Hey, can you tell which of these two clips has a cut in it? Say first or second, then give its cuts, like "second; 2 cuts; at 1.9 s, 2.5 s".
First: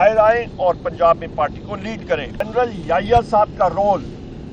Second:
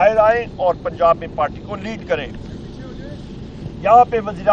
first; 1 cut; at 2.4 s